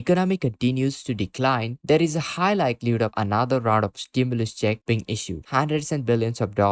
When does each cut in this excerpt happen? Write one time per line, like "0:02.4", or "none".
0:05.4